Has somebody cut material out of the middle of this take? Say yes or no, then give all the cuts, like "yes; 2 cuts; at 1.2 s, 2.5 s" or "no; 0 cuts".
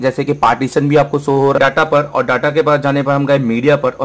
yes; 1 cut; at 1.6 s